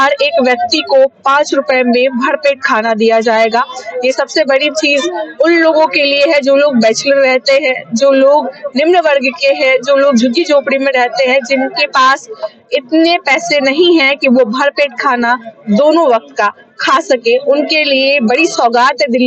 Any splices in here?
no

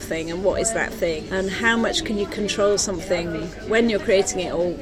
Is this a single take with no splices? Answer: no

